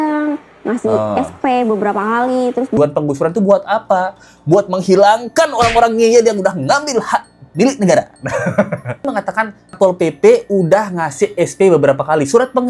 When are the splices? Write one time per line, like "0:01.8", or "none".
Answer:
0:02.8
0:09.1